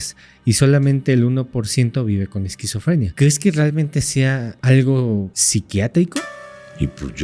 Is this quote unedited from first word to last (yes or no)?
no